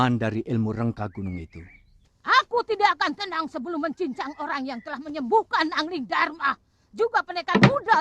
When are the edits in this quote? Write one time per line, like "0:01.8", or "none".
0:02.0